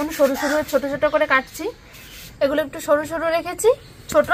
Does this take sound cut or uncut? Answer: cut